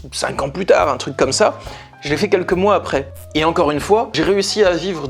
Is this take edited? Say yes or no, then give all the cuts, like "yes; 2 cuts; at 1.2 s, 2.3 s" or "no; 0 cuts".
yes; 1 cut; at 3.3 s